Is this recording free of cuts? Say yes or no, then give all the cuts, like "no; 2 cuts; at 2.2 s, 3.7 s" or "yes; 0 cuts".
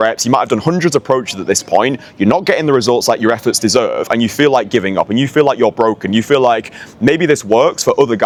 yes; 0 cuts